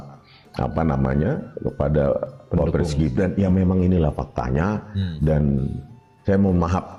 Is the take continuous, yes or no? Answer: yes